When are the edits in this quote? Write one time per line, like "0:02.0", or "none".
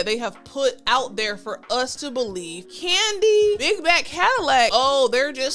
0:02.6
0:03.6
0:04.7

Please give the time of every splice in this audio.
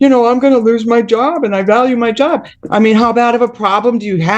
0:02.5

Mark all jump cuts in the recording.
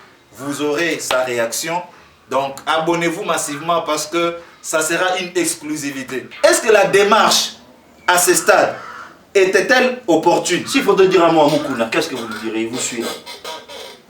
0:06.3

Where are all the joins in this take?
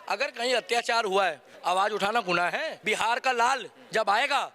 0:01.5
0:02.8

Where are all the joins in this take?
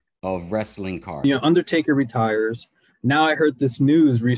0:01.2

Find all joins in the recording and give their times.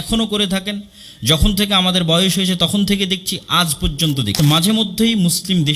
0:04.4

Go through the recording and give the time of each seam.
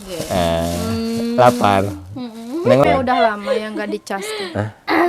0:02.8

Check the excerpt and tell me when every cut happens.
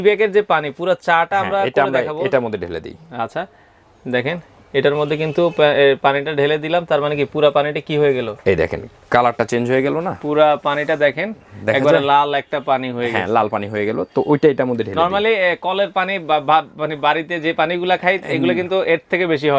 none

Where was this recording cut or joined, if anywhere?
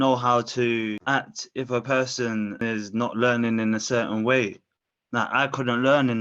0:01.0
0:02.6

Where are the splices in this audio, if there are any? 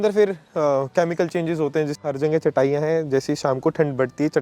0:01.9

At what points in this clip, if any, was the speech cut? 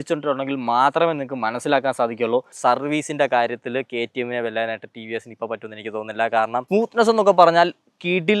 0:02.6
0:06.7

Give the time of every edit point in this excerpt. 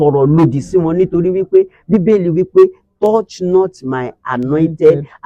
none

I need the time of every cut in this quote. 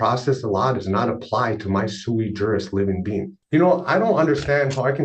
0:03.0

